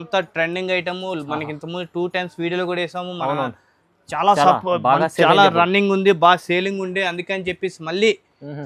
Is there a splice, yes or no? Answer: no